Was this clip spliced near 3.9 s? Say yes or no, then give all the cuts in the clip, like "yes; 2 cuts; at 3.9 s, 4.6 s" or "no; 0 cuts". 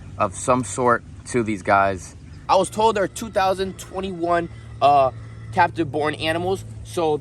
no; 1 cut; at 2.3 s